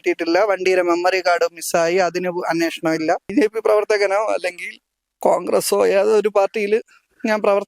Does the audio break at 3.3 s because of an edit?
yes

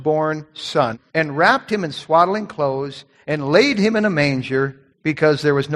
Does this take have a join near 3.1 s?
no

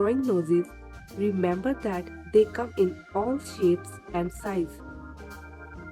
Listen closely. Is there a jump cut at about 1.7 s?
no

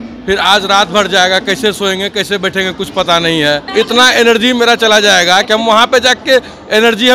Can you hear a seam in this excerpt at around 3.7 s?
yes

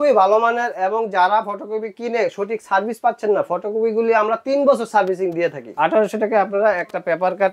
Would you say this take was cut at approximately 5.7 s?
yes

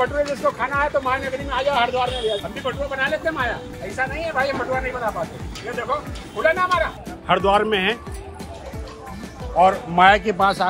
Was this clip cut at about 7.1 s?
yes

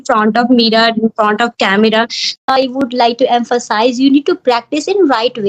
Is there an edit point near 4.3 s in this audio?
no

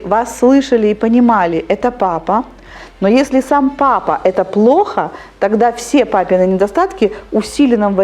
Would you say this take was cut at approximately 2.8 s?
yes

